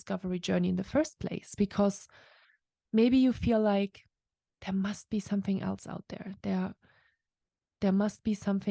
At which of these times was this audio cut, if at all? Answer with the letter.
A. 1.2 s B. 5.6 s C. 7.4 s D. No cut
D